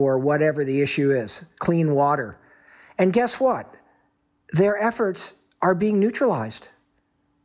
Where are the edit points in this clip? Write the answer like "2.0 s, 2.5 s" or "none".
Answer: none